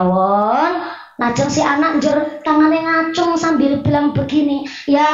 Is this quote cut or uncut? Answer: uncut